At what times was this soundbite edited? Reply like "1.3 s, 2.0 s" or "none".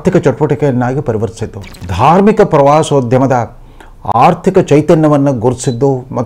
1.8 s